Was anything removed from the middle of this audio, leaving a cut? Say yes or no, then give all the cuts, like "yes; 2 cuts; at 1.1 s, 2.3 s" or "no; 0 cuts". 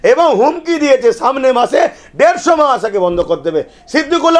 no; 0 cuts